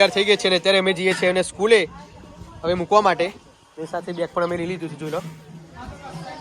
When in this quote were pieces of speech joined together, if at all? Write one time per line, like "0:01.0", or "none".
none